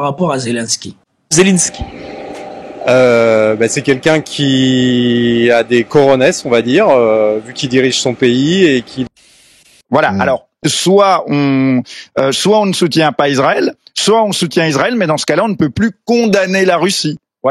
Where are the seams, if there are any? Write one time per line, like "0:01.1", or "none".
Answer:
0:09.2